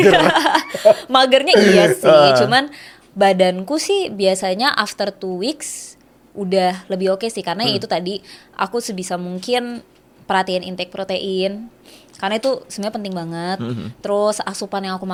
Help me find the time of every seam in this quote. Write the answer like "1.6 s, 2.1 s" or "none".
none